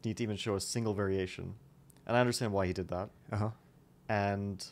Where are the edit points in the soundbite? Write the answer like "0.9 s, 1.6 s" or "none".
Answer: 1.8 s